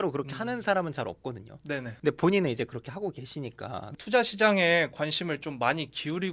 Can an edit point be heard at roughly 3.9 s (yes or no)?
yes